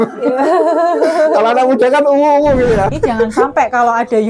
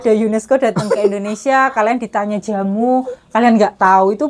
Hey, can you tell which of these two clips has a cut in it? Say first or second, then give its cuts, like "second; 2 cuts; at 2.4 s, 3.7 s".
first; 1 cut; at 2.9 s